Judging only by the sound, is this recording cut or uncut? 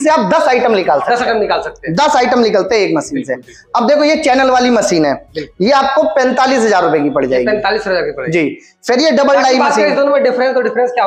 uncut